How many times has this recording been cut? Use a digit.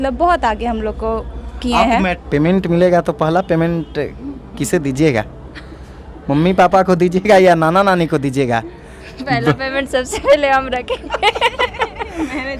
1